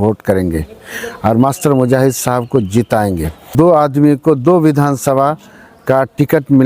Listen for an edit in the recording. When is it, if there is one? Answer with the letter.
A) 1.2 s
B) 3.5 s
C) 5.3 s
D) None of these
B